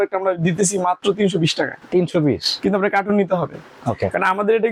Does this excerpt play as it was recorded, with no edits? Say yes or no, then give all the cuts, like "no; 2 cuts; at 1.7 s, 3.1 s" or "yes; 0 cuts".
yes; 0 cuts